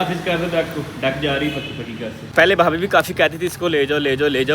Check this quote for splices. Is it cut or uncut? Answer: cut